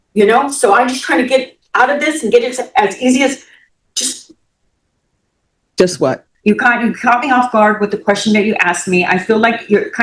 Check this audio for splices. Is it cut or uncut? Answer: cut